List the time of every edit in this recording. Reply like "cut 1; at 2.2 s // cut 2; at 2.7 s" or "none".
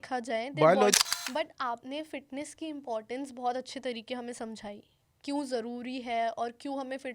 cut 1; at 1.0 s